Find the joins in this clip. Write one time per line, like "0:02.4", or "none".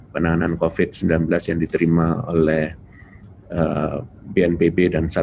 none